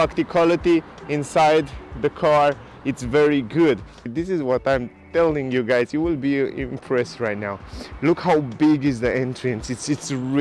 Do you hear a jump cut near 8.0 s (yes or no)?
no